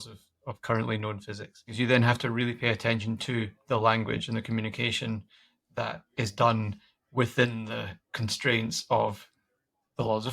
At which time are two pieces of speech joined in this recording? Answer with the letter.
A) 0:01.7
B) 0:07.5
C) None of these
A